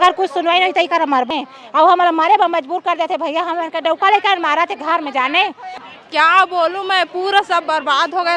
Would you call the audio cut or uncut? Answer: cut